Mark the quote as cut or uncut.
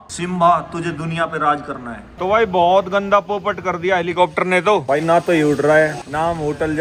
cut